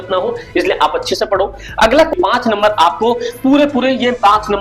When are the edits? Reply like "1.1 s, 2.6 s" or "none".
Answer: 2.1 s